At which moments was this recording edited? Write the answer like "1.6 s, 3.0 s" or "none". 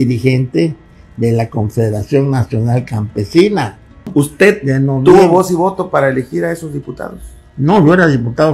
4.1 s

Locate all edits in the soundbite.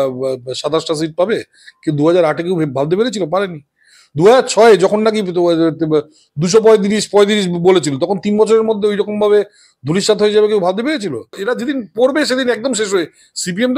11.4 s

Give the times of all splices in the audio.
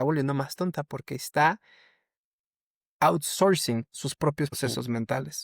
4.5 s

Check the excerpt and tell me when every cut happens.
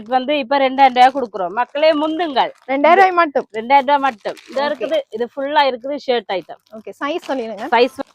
none

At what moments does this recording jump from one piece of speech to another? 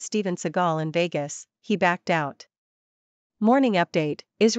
3.3 s

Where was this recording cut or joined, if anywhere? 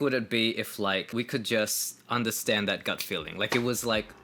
none

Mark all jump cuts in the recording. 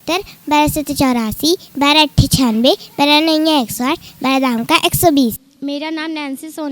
5.5 s

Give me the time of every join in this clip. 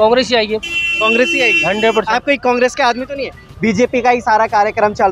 3.5 s

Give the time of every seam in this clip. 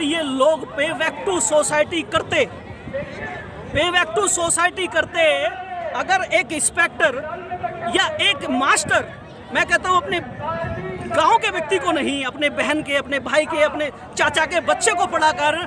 none

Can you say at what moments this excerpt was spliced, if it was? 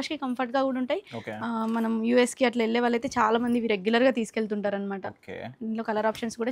none

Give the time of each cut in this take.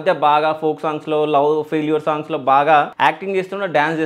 2.9 s

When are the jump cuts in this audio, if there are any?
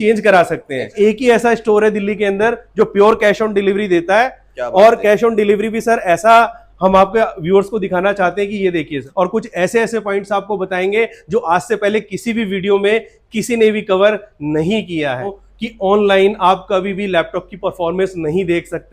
0.9 s, 9.0 s, 15.3 s

